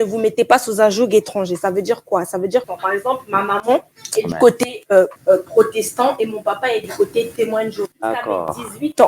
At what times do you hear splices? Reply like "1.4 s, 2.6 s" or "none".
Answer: 2.7 s, 4.0 s, 5.2 s, 7.9 s